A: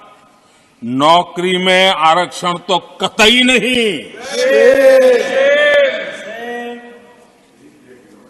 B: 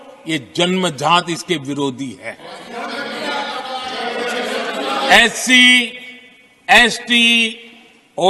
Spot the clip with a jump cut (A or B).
B